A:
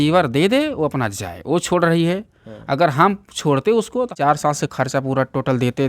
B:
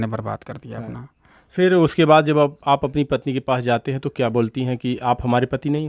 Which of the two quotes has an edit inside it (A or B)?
A